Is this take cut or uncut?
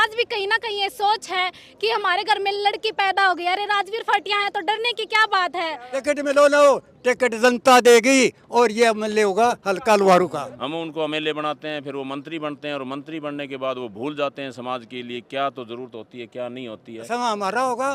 cut